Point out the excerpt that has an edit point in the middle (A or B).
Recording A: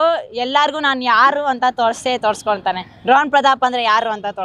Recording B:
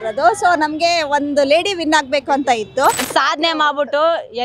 B